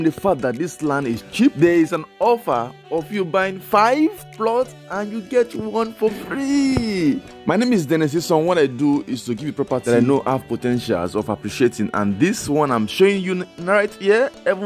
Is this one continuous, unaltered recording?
no; 3 cuts; at 1.6 s, 7.3 s, 9.8 s

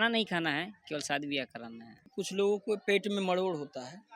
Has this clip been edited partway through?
yes; 1 cut; at 2.2 s

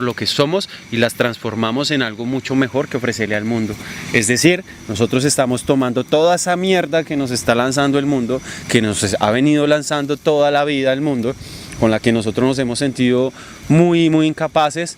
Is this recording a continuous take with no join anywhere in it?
yes; 0 cuts

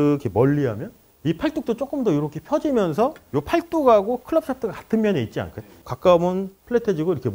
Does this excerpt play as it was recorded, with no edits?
no; 1 cut; at 5.9 s

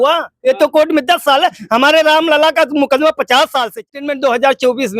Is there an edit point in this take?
yes; 1 cut; at 3.7 s

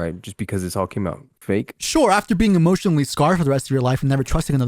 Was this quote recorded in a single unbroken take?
yes; 0 cuts

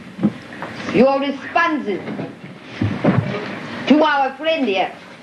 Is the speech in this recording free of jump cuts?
no; 1 cut; at 1.0 s

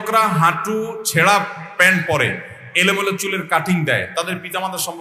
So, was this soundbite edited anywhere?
no; 0 cuts

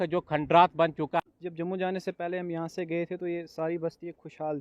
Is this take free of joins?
no; 1 cut; at 1.2 s

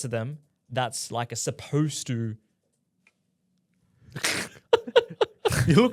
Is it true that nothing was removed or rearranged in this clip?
yes; 0 cuts

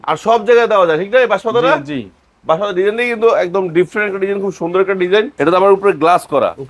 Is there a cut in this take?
yes; 1 cut; at 5.3 s

